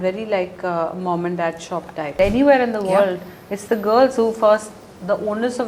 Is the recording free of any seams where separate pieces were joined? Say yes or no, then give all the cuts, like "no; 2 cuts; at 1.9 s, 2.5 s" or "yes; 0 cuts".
no; 1 cut; at 2.2 s